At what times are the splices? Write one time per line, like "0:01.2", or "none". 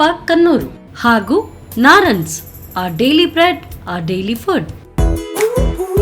0:04.8